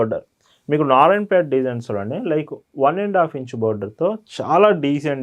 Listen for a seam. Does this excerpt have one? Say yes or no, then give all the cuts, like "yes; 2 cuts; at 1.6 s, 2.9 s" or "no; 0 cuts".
no; 0 cuts